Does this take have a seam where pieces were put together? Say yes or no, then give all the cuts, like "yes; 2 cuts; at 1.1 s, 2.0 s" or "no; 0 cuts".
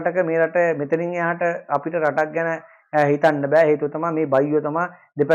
no; 0 cuts